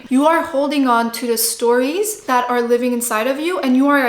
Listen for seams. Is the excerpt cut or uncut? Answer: cut